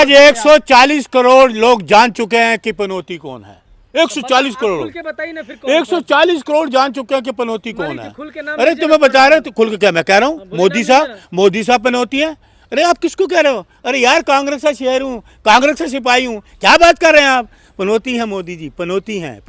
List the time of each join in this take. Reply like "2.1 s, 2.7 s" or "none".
none